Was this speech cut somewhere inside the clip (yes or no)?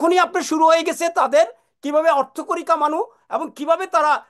no